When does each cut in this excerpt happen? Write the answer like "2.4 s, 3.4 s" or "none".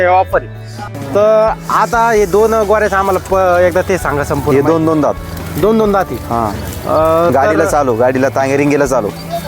0.9 s